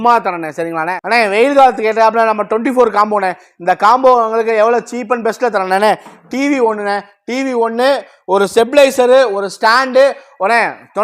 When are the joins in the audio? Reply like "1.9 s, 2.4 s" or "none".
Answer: 0.9 s